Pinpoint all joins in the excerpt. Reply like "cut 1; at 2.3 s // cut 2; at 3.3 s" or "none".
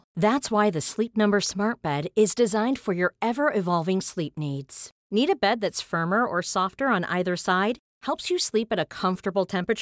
none